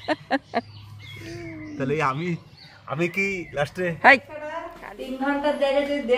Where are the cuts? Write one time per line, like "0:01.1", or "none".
0:04.7